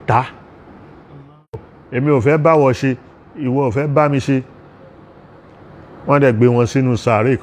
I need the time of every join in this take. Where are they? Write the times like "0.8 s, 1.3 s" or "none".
1.7 s

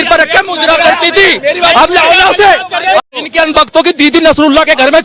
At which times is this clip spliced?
3.0 s

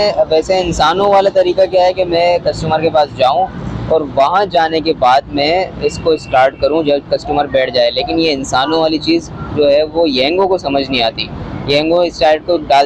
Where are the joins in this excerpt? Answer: none

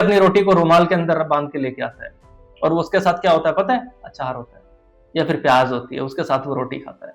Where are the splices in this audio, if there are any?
none

